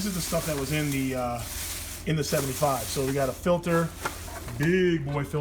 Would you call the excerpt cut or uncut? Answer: uncut